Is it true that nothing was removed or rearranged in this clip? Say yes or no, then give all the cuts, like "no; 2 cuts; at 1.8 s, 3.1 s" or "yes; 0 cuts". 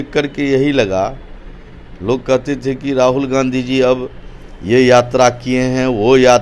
yes; 0 cuts